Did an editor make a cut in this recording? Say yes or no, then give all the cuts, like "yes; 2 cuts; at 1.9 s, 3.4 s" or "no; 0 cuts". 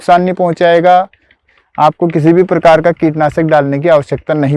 yes; 1 cut; at 1.4 s